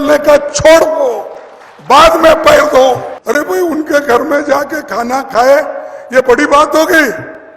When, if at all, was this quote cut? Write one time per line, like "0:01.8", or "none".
0:03.1